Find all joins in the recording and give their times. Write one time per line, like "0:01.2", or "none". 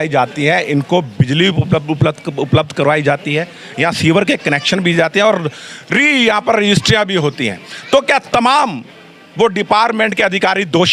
none